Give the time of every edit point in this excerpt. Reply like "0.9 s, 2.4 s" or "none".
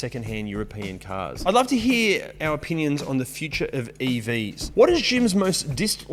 1.4 s, 4.6 s